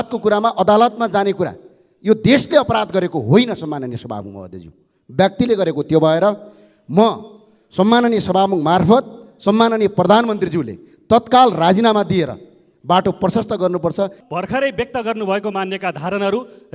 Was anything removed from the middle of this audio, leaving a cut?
yes; 1 cut; at 14.2 s

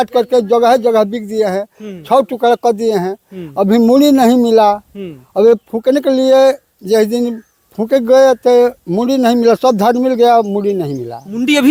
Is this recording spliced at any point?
no; 0 cuts

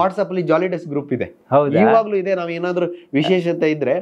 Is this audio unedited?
yes; 0 cuts

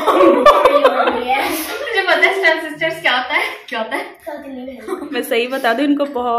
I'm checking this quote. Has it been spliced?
yes; 1 cut; at 5.1 s

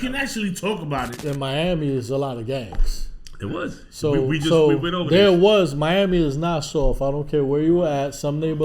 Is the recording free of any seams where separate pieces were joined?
no; 1 cut; at 1.1 s

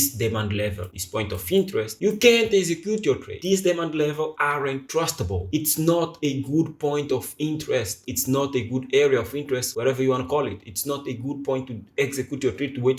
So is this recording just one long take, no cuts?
yes; 0 cuts

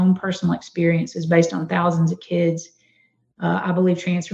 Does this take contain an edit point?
no; 0 cuts

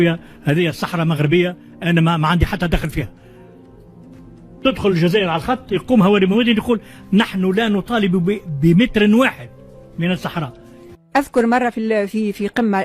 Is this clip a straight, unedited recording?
no; 1 cut; at 11.0 s

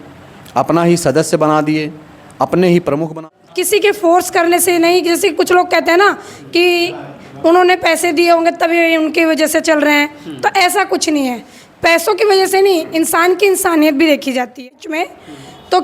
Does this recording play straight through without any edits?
no; 2 cuts; at 3.2 s, 14.8 s

